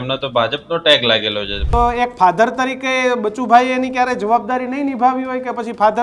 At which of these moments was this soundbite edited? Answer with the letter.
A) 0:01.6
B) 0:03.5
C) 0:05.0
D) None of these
A